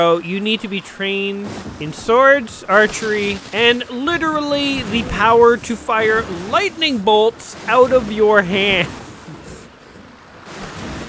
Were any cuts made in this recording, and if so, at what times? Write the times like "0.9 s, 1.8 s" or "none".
1.6 s, 3.4 s